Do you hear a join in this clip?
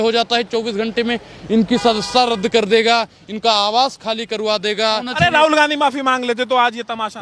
yes; 1 cut; at 5.1 s

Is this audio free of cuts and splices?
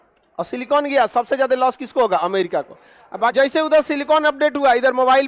no; 1 cut; at 3.3 s

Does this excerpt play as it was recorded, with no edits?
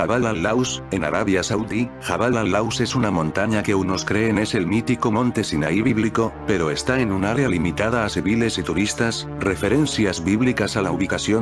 no; 1 cut; at 1.6 s

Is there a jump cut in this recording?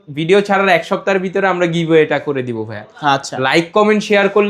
no; 0 cuts

